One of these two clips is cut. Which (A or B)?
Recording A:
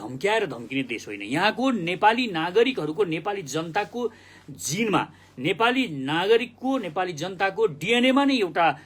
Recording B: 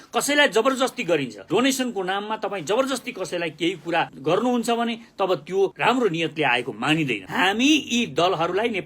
B